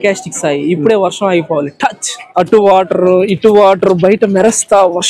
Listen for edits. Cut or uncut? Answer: cut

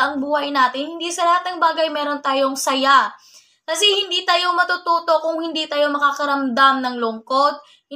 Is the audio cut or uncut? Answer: uncut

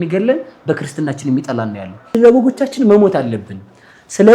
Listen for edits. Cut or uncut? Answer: cut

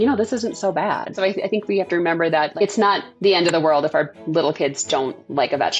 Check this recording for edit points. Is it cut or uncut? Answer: cut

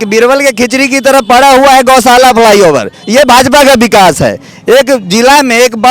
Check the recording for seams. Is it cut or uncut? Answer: uncut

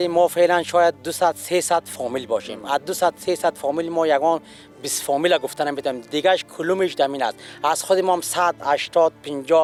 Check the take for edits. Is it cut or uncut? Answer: uncut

